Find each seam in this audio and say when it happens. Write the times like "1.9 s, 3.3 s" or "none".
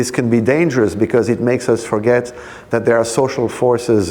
none